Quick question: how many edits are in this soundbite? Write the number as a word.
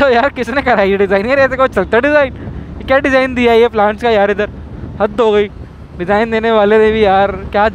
zero